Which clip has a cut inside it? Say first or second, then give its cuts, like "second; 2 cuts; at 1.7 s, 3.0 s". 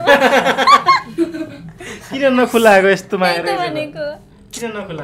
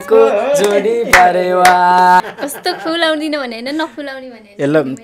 second; 1 cut; at 2.4 s